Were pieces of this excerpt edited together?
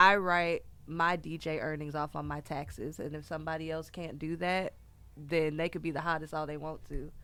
no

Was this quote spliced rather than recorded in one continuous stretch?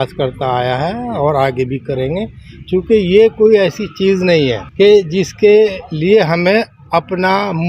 yes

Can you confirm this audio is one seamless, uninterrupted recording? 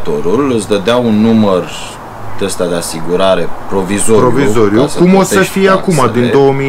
yes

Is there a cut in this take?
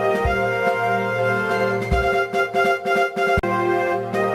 yes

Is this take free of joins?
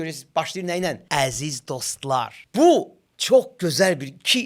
no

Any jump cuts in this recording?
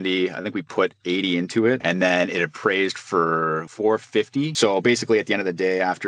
yes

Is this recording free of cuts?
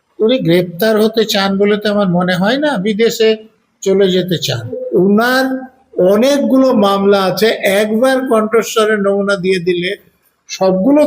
no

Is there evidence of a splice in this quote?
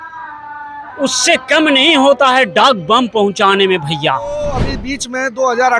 yes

